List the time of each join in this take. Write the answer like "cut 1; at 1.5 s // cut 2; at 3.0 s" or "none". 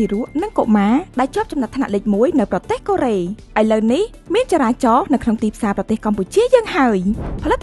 none